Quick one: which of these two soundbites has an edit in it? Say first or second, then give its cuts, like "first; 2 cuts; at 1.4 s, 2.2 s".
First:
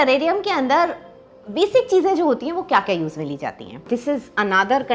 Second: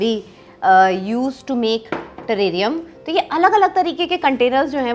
first; 1 cut; at 3.9 s